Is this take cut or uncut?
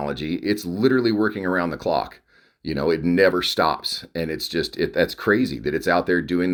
uncut